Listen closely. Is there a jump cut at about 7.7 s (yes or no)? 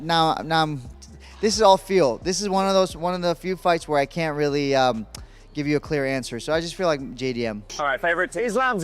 yes